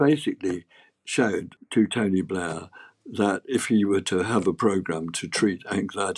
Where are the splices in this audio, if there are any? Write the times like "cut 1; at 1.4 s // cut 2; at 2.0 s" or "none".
none